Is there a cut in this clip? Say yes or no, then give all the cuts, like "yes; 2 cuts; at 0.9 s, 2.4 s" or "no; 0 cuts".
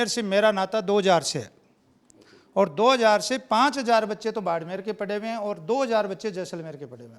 no; 0 cuts